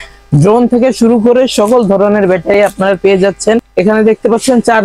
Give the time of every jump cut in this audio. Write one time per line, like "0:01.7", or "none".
0:03.7